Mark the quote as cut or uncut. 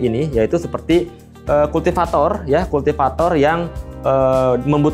uncut